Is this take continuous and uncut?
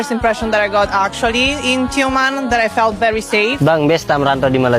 no; 1 cut; at 3.6 s

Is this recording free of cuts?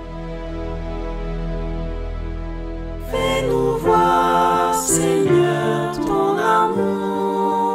no; 1 cut; at 3.1 s

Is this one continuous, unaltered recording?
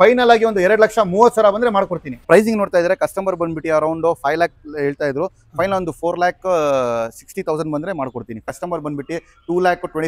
no; 2 cuts; at 2.1 s, 8.5 s

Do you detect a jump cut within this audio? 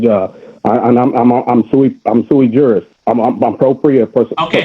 yes; 1 cut; at 2.9 s

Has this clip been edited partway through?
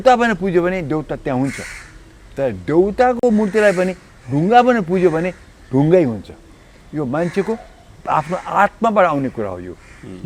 no; 0 cuts

